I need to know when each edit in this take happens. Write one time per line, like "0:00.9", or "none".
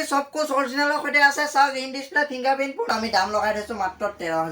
0:02.9